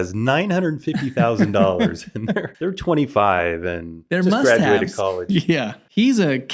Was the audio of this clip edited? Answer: no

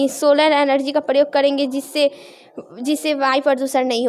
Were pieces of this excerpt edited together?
no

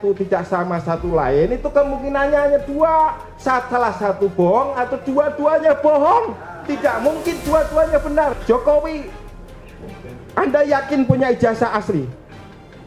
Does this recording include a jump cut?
yes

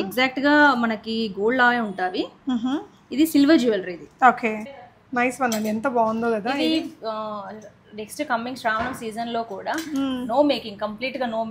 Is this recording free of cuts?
no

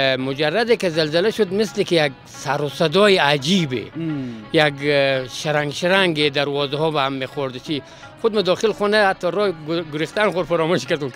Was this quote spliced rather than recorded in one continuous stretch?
no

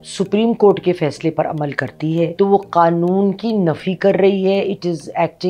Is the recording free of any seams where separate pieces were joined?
no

